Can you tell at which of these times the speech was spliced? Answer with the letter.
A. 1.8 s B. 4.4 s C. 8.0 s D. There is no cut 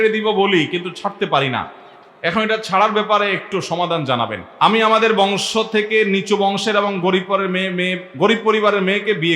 B